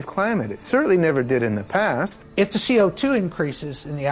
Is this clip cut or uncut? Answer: cut